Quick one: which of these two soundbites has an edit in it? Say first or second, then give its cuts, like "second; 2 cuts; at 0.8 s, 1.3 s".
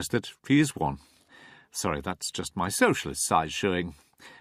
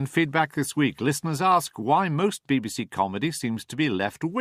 second; 1 cut; at 1.7 s